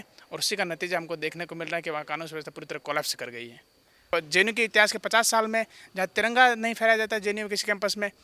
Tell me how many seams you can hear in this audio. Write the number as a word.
one